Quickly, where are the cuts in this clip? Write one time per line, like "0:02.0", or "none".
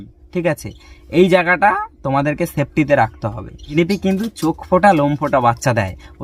0:03.8